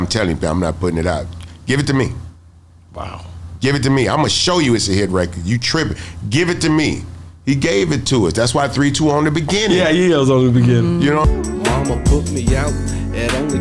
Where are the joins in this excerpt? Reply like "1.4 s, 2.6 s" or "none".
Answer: none